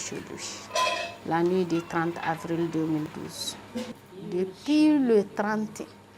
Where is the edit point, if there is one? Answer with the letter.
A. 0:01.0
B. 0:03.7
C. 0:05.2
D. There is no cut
B